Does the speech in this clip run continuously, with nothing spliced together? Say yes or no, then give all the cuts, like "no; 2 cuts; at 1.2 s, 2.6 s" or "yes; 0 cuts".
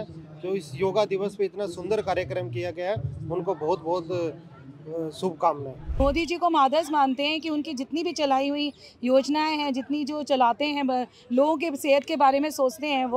no; 1 cut; at 5.9 s